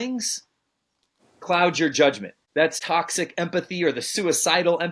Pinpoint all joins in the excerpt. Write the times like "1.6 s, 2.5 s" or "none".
2.7 s